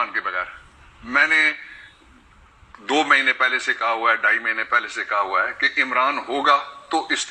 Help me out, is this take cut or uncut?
uncut